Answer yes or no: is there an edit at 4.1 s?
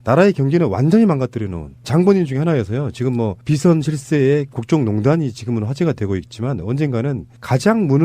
no